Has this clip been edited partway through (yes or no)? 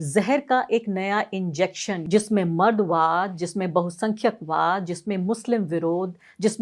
yes